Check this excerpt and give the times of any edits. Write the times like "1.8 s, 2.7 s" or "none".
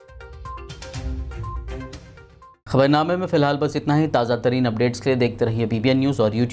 none